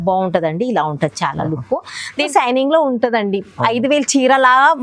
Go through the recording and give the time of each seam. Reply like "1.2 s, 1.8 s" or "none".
2.3 s